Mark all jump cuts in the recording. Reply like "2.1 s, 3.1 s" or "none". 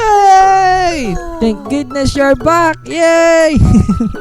1.2 s